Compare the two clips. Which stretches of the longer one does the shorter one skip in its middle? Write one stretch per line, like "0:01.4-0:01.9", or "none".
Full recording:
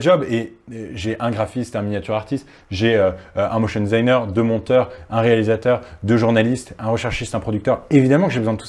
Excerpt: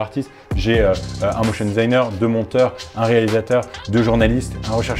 none